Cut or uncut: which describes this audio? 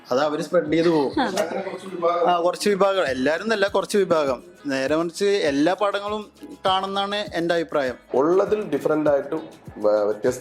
cut